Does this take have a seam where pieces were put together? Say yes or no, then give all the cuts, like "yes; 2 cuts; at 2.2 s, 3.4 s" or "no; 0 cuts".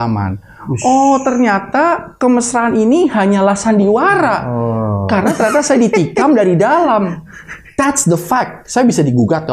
no; 0 cuts